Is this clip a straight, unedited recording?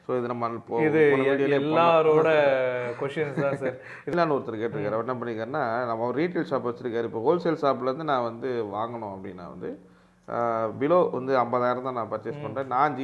no; 1 cut; at 4.1 s

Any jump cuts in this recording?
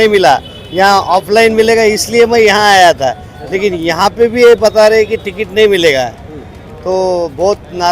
no; 0 cuts

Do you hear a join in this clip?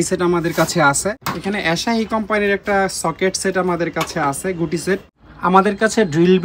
yes; 2 cuts; at 1.3 s, 5.2 s

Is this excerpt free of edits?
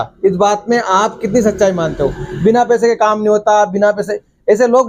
yes; 0 cuts

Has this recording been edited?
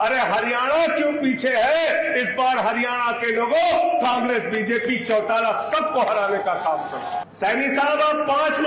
yes; 1 cut; at 7.3 s

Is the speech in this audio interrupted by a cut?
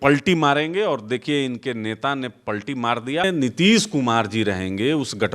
yes; 1 cut; at 3.3 s

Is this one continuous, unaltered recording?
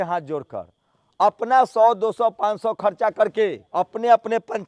no; 1 cut; at 3.6 s

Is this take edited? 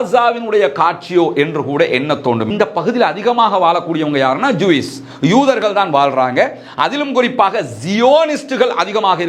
yes; 1 cut; at 2.5 s

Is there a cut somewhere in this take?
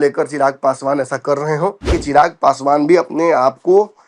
yes; 1 cut; at 2.0 s

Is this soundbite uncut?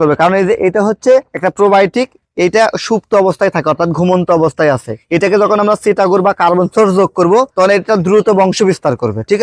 yes; 0 cuts

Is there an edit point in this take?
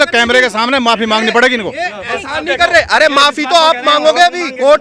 no; 0 cuts

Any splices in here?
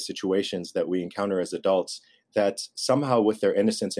no; 0 cuts

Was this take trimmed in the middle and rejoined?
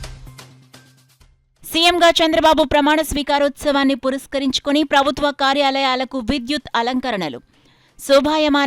yes; 1 cut; at 1.4 s

